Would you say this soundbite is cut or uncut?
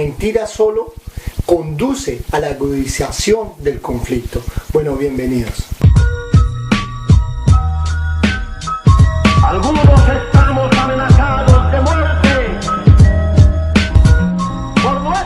cut